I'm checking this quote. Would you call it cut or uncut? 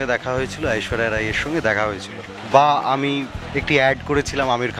cut